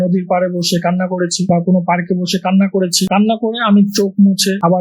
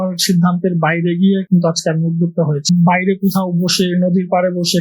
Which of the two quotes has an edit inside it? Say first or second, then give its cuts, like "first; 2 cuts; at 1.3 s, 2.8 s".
second; 1 cut; at 2.8 s